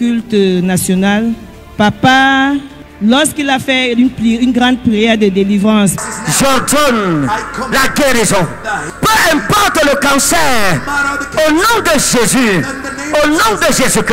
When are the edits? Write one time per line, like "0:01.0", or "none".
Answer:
0:08.9